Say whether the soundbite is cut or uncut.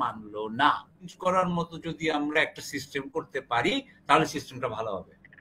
cut